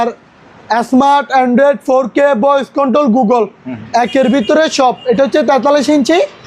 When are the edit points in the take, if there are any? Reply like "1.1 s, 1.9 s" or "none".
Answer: none

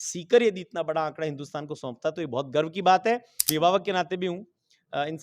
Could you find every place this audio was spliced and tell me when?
3.5 s

